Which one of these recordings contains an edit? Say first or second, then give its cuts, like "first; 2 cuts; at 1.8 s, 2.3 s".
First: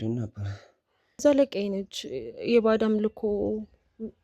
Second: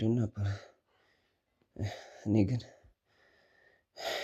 first; 1 cut; at 1.2 s